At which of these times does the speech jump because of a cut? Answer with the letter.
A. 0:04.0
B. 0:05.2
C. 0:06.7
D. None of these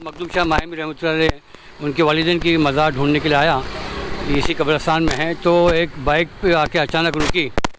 D